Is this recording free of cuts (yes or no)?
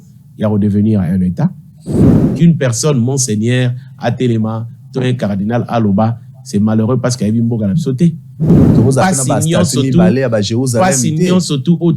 no